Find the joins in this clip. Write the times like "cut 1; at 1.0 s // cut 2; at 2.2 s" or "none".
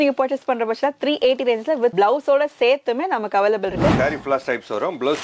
cut 1; at 1.9 s // cut 2; at 3.9 s